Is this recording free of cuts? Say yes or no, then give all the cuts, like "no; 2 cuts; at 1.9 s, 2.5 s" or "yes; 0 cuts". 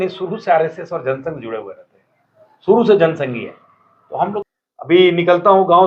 no; 1 cut; at 4.4 s